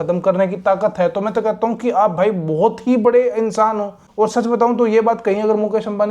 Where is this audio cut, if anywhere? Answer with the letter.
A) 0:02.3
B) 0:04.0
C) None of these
B